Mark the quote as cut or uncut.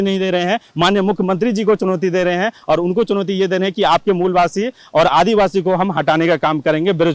uncut